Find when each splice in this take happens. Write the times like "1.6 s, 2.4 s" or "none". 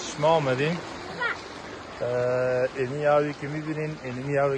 none